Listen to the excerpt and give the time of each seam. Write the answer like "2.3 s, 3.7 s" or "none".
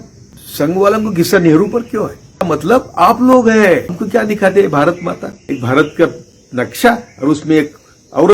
2.4 s, 4.0 s, 5.3 s

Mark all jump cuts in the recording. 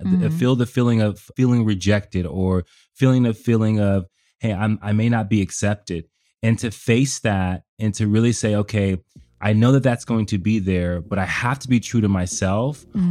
1.3 s

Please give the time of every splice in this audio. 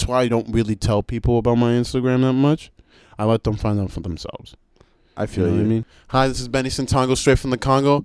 6.0 s

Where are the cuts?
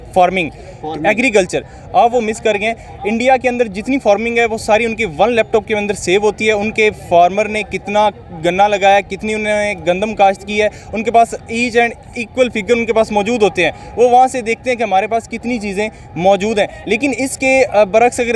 none

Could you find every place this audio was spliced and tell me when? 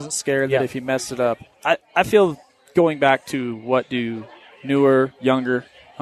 1.5 s

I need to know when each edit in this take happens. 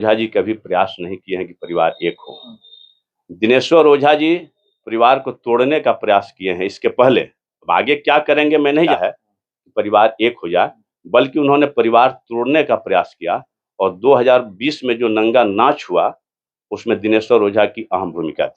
8.9 s

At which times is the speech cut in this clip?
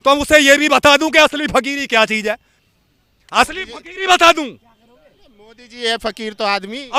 none

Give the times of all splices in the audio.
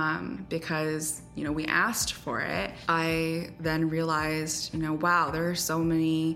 2.8 s

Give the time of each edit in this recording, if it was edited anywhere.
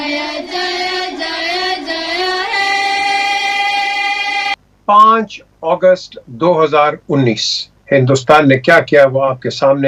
none

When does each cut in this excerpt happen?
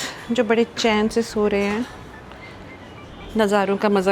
none

